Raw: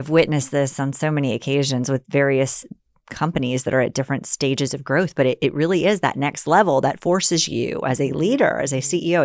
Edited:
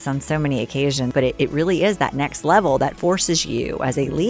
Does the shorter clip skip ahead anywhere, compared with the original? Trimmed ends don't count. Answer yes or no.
yes